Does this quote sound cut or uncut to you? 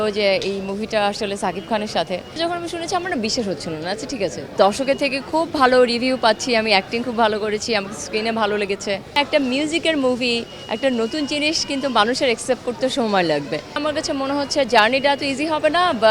cut